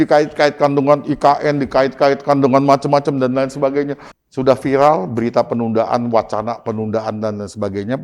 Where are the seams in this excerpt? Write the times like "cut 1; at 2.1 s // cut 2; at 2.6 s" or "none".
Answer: cut 1; at 4.0 s